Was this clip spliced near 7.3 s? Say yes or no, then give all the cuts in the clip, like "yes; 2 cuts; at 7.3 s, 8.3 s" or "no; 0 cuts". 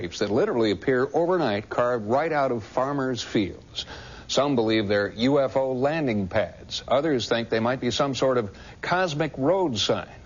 yes; 1 cut; at 7.3 s